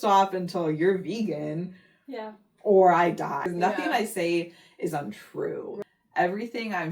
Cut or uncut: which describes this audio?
cut